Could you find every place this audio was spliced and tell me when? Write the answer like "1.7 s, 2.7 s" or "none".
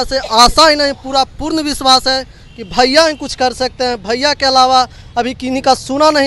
none